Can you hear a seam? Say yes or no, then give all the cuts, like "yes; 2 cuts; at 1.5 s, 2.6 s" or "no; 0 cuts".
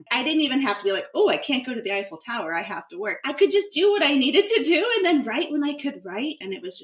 no; 0 cuts